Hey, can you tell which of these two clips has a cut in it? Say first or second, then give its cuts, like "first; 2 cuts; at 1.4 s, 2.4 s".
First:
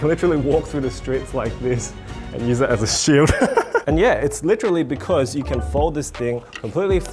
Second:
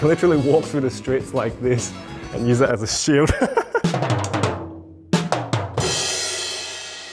second; 1 cut; at 3.8 s